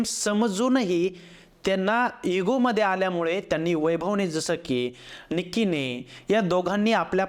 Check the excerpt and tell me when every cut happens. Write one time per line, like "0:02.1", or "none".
none